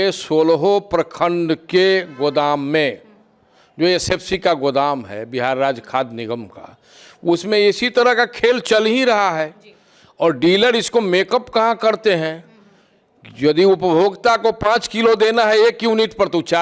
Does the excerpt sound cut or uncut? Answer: uncut